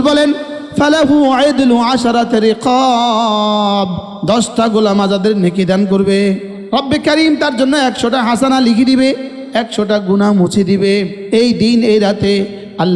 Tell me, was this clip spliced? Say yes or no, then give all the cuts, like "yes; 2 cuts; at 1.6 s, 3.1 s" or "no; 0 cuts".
yes; 3 cuts; at 6.5 s, 9.4 s, 11.2 s